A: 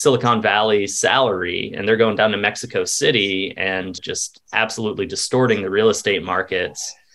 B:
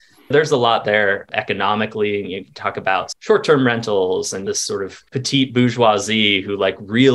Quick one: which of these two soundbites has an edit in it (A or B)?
B